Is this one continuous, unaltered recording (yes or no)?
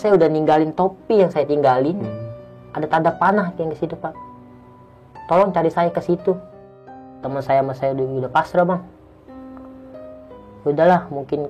no